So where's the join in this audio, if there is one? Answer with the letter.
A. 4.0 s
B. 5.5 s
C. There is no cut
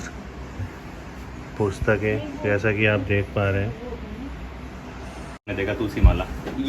B